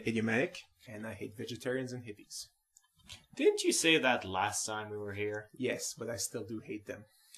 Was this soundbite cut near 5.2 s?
yes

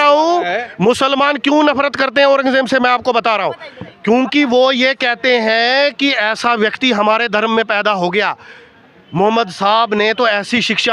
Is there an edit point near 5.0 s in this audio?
no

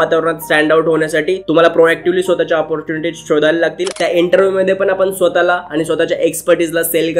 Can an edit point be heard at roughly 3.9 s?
yes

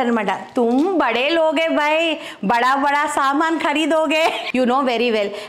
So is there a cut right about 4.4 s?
yes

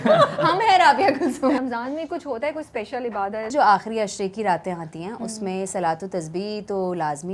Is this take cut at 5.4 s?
no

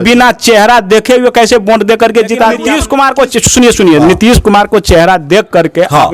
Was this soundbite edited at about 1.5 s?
no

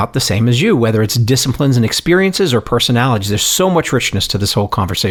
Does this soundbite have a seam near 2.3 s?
no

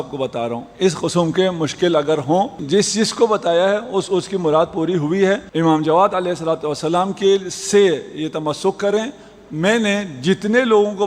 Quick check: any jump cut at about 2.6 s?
yes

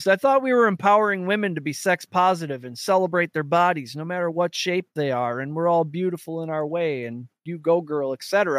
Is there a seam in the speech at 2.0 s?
no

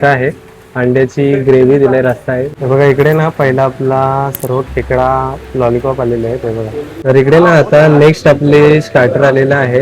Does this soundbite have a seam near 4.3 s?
no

